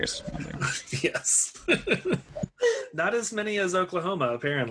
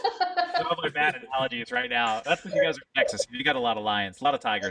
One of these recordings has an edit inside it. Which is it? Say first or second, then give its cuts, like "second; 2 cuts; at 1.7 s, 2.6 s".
first; 1 cut; at 2.4 s